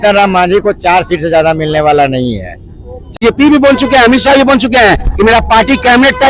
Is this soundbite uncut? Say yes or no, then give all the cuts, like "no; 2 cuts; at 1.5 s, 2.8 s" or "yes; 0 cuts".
no; 1 cut; at 3.2 s